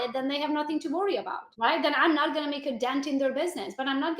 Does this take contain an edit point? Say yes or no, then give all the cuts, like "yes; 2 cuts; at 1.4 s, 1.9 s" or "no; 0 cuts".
yes; 1 cut; at 1.4 s